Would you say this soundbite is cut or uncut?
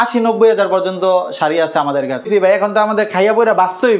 cut